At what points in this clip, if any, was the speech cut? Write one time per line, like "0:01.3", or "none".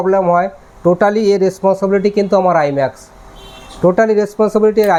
none